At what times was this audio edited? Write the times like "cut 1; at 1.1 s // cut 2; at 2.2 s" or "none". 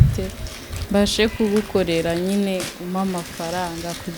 none